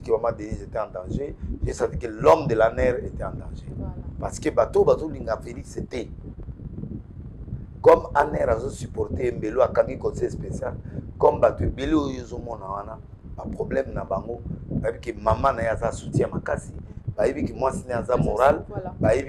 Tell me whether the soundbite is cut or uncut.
uncut